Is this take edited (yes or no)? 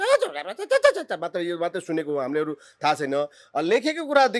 no